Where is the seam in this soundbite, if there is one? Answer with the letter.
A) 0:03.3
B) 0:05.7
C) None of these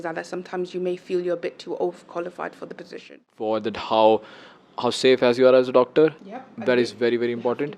A